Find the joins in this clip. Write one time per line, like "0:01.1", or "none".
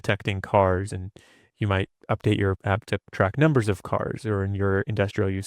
0:02.0
0:02.8